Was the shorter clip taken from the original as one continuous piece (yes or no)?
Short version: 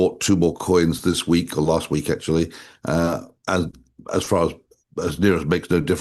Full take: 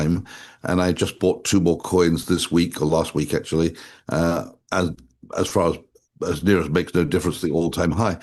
yes